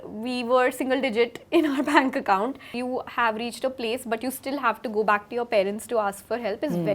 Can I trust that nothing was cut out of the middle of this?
no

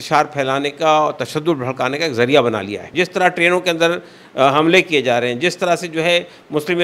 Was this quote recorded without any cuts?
no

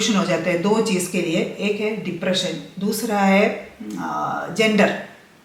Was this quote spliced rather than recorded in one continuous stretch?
no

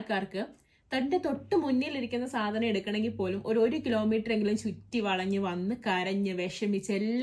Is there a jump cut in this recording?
no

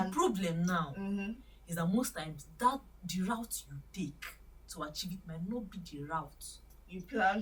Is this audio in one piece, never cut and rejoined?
yes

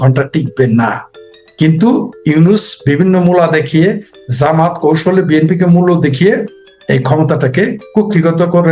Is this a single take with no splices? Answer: yes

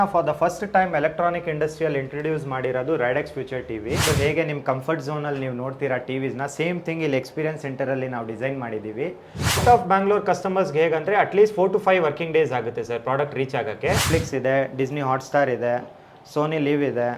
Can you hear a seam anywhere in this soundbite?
yes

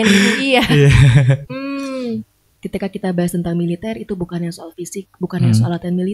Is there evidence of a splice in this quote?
yes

